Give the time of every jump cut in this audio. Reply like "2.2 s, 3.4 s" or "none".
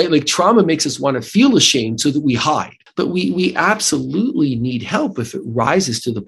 2.8 s

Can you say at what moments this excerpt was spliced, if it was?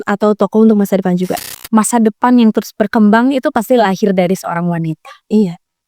1.4 s

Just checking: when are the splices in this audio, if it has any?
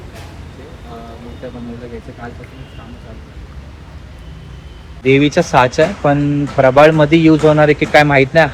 5.0 s

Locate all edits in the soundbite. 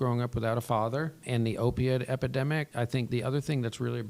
1.2 s, 2.9 s

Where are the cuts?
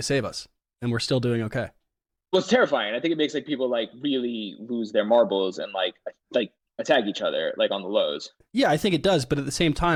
none

